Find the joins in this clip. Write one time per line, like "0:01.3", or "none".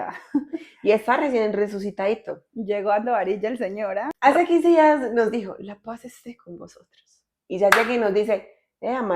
0:04.1